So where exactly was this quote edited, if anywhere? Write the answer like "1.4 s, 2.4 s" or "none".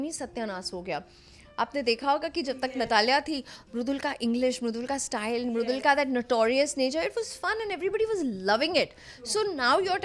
none